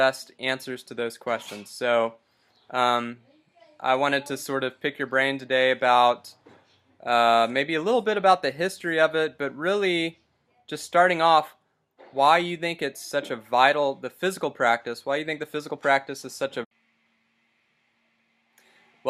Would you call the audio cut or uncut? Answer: uncut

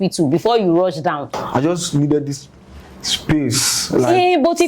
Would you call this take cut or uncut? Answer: cut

